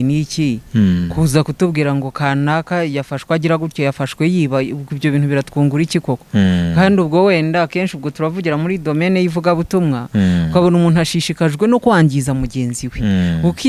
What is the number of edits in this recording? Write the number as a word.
zero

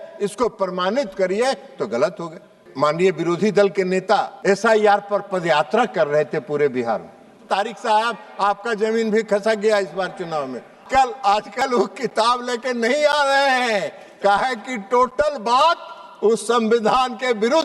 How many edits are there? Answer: four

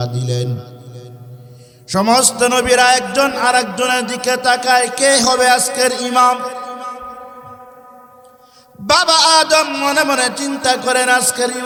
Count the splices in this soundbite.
zero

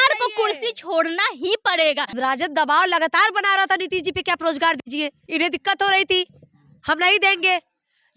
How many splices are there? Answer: two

